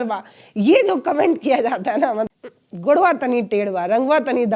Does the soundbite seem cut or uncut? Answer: cut